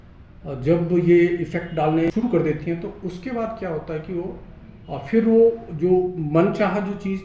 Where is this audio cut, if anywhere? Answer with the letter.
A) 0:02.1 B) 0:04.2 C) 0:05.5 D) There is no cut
A